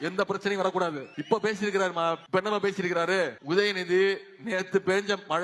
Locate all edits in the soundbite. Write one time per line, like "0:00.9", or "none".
0:01.1
0:02.2
0:03.4

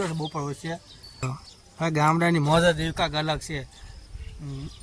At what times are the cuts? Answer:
0:01.2

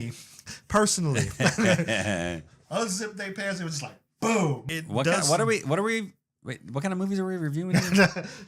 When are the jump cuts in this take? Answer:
none

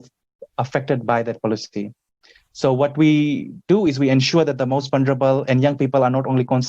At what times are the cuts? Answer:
none

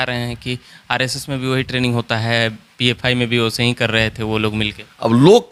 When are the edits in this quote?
none

